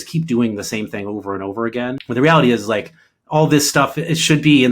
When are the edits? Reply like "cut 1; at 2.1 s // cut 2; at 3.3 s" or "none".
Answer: cut 1; at 2.0 s